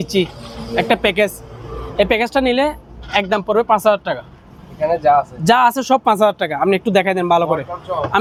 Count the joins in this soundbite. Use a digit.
0